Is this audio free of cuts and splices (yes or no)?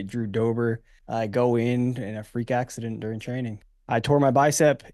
no